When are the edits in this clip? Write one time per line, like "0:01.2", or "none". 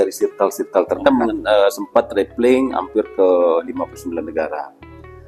0:01.1